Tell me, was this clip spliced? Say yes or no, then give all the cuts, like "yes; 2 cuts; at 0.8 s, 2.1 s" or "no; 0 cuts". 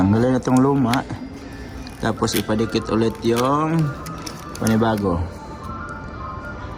no; 0 cuts